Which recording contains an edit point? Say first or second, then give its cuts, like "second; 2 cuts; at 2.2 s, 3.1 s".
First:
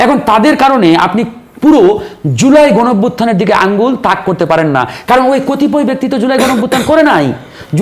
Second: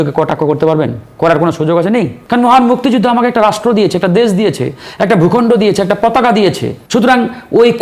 second; 2 cuts; at 2.2 s, 6.7 s